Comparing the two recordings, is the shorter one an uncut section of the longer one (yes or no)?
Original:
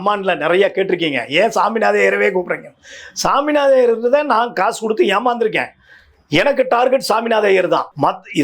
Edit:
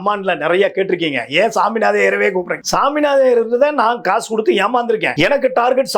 no